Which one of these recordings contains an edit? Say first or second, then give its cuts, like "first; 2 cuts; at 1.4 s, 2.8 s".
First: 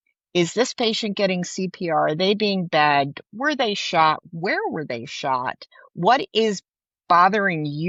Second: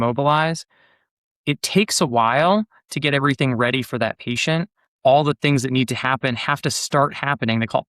second; 2 cuts; at 1.1 s, 4.9 s